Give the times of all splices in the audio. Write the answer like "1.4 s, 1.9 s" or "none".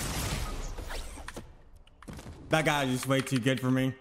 2.5 s